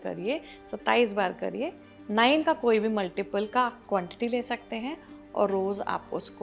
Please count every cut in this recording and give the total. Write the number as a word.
zero